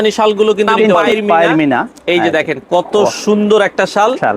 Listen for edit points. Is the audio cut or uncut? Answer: cut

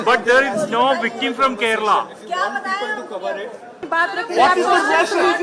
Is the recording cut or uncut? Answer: cut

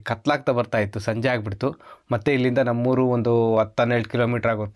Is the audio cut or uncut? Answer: uncut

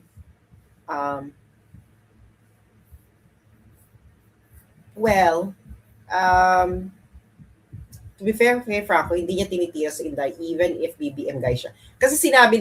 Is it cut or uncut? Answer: uncut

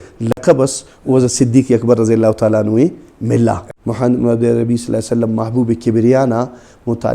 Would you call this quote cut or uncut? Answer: cut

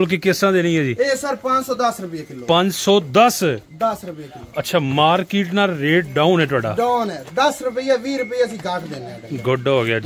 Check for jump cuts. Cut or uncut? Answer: uncut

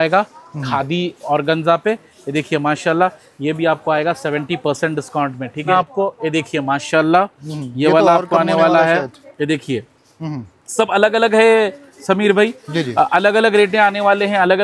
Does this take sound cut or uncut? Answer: cut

